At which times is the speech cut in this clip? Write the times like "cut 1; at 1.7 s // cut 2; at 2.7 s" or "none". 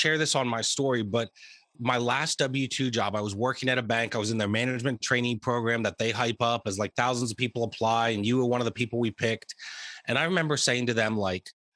cut 1; at 1.8 s